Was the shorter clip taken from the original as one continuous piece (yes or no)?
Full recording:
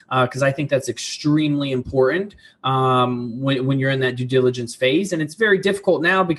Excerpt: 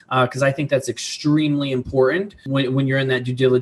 no